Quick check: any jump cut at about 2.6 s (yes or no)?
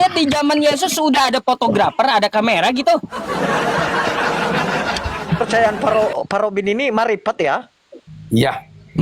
no